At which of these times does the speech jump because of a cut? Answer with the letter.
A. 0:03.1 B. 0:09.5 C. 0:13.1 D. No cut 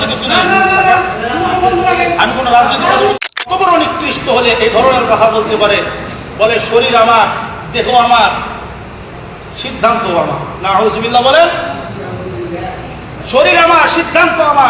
A